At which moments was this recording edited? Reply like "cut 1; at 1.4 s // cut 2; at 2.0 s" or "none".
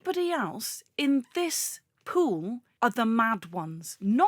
cut 1; at 2.7 s